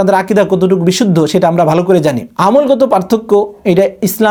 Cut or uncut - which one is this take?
uncut